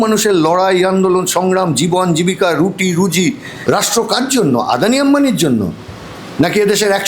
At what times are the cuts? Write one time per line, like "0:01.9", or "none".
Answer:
0:03.5

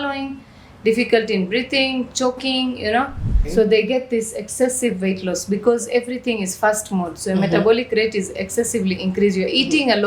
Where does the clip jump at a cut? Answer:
0:03.4

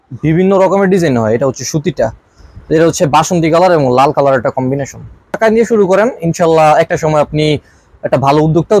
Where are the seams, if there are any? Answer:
0:05.4

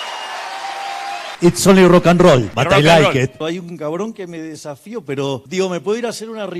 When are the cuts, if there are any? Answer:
0:01.3
0:02.5
0:03.4
0:05.5

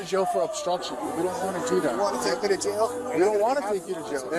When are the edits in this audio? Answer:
none

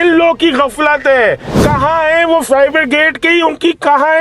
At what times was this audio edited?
0:01.6

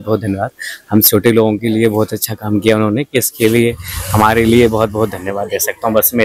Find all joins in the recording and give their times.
none

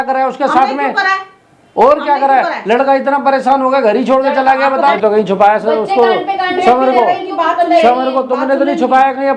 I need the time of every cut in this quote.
0:04.8

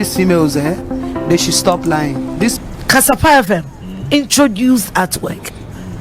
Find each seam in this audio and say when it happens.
0:02.8

